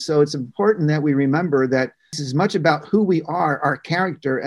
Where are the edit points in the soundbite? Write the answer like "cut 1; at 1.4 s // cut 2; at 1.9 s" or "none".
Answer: cut 1; at 2.2 s